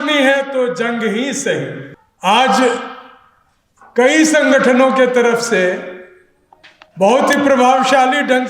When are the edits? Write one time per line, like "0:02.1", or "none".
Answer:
none